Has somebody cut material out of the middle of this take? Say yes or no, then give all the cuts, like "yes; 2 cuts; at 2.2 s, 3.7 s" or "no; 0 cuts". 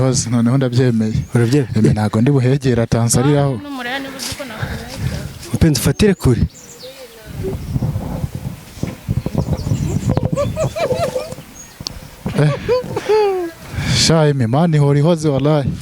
no; 0 cuts